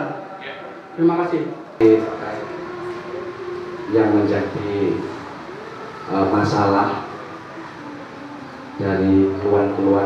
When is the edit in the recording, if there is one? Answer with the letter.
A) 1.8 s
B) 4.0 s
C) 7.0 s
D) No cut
A